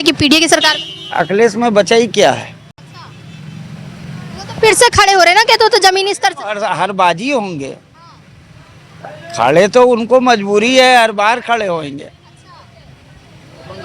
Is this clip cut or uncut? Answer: uncut